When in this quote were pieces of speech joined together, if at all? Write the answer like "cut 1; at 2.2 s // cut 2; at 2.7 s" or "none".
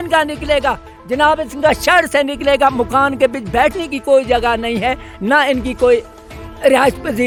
none